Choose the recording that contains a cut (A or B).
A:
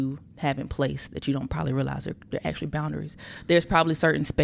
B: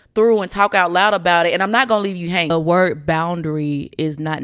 B